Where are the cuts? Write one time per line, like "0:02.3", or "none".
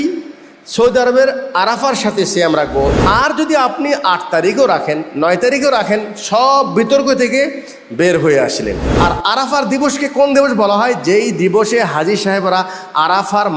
0:02.9
0:08.9